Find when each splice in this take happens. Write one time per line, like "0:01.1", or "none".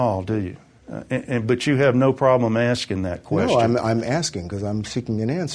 none